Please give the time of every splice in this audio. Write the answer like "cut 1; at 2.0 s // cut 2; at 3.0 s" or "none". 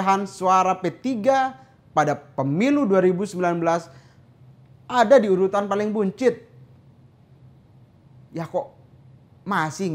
none